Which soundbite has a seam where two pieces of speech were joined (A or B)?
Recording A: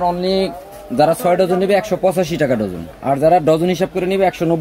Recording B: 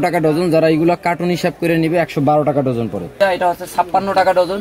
B